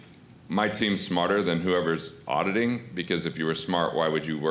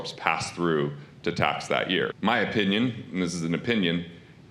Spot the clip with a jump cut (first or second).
second